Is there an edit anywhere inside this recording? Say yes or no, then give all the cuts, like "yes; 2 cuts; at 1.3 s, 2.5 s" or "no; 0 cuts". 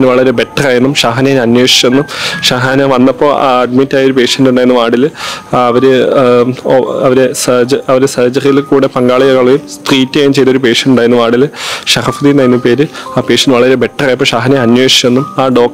no; 0 cuts